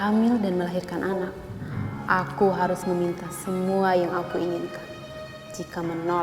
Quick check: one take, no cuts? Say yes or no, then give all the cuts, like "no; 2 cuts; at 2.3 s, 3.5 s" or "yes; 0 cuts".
yes; 0 cuts